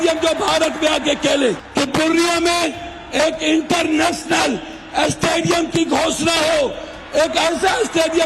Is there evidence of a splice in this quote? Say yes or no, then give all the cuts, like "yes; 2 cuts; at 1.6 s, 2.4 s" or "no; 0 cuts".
yes; 1 cut; at 1.6 s